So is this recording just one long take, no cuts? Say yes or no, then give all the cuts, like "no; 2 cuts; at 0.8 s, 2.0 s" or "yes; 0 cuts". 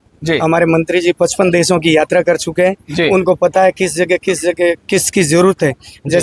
yes; 0 cuts